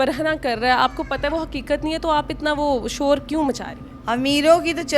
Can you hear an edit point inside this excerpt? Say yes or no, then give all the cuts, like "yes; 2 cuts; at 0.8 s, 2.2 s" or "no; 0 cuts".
yes; 1 cut; at 3.9 s